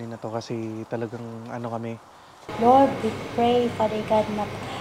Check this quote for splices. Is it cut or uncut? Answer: cut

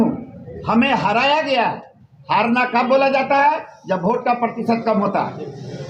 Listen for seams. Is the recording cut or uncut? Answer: uncut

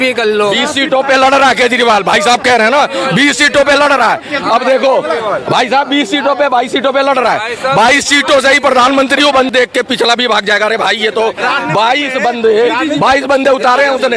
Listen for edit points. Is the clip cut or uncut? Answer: cut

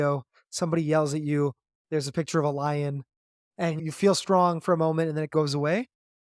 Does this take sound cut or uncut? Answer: cut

